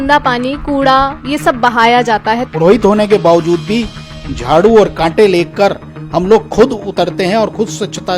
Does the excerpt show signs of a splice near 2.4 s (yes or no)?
yes